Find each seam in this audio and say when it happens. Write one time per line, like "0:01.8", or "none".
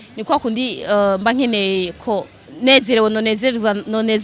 0:02.4